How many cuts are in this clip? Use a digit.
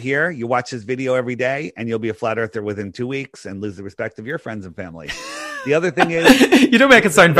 1